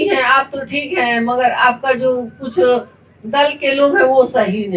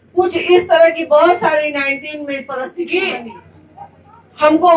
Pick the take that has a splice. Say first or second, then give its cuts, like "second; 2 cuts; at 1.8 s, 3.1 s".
second; 1 cut; at 2.6 s